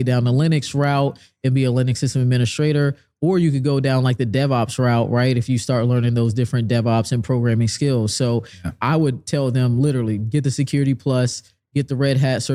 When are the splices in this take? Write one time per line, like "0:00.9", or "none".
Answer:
none